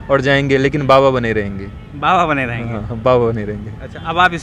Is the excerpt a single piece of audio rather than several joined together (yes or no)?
yes